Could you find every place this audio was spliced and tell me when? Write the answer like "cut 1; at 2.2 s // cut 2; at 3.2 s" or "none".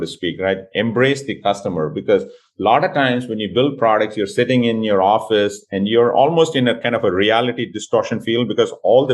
none

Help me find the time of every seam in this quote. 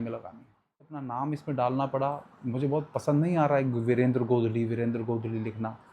cut 1; at 1.0 s

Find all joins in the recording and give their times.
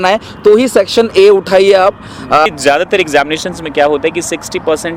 cut 1; at 2.5 s

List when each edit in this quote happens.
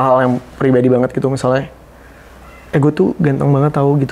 none

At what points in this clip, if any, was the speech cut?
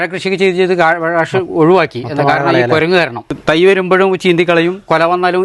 cut 1; at 3.3 s

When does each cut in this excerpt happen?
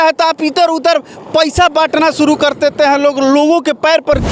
none

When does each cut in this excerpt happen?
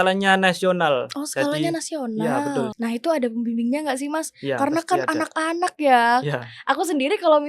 cut 1; at 2.7 s

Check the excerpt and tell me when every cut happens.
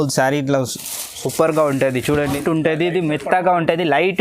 cut 1; at 2.4 s

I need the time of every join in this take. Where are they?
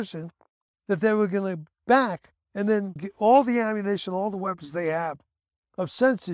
cut 1; at 2.8 s

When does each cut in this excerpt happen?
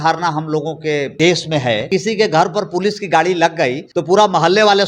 cut 1; at 1.1 s // cut 2; at 1.9 s // cut 3; at 3.9 s

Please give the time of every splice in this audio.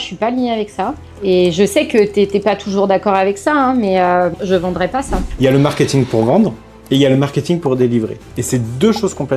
cut 1; at 1.1 s // cut 2; at 4.9 s

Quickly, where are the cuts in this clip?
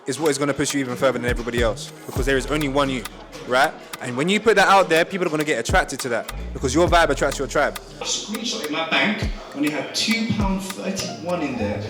cut 1; at 8.1 s

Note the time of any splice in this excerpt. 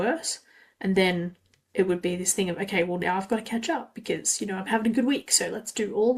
none

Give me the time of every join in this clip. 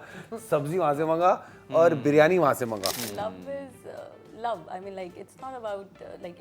cut 1; at 2.9 s

